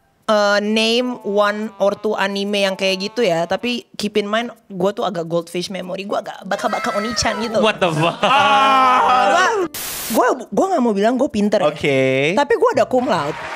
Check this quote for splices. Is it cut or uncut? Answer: cut